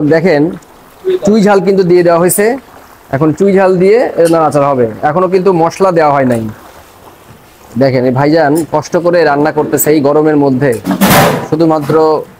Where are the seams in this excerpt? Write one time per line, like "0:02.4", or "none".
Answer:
none